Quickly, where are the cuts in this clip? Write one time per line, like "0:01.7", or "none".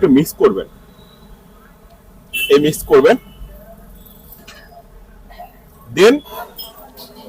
0:06.3